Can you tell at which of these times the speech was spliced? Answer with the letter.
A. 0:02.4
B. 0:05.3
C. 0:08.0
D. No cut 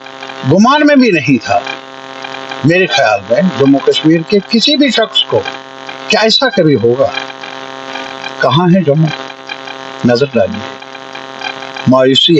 C